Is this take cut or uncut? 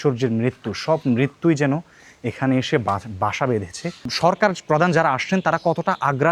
cut